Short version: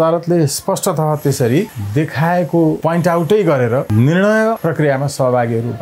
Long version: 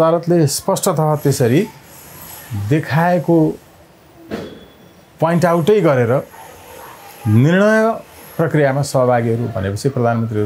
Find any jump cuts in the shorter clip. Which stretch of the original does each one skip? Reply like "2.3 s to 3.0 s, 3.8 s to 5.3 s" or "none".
1.8 s to 2.5 s, 3.5 s to 5.2 s, 6.2 s to 7.2 s, 8.0 s to 8.3 s